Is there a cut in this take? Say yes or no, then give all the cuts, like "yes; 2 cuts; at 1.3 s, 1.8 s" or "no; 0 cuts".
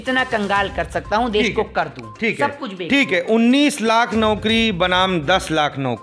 no; 0 cuts